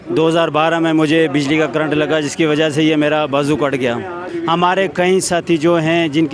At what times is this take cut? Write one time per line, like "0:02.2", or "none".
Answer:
0:04.3